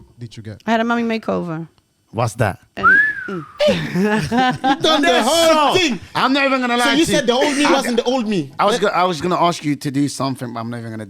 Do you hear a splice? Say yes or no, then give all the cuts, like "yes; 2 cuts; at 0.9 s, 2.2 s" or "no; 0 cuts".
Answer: yes; 1 cut; at 2.7 s